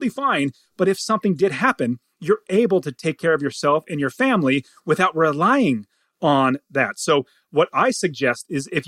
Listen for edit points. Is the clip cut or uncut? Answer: uncut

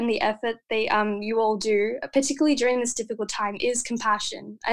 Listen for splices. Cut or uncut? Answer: uncut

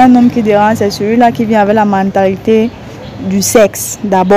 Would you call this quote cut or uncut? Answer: uncut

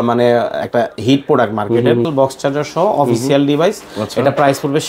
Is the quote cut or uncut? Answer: cut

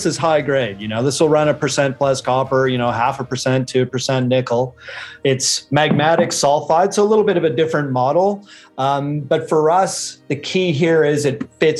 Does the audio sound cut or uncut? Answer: uncut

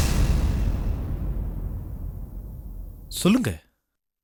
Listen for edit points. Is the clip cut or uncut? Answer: uncut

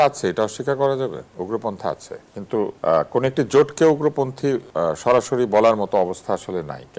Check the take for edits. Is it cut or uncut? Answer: cut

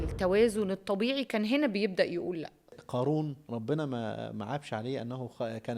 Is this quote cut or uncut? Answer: cut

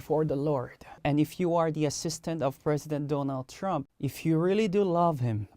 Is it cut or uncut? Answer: cut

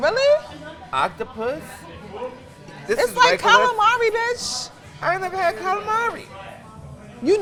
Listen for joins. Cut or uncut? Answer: uncut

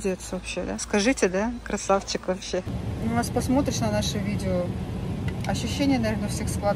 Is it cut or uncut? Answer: cut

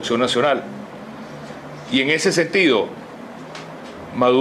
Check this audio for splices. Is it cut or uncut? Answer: uncut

